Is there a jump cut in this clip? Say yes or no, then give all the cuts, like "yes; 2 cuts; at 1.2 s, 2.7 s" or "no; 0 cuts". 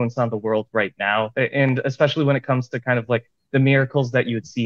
no; 0 cuts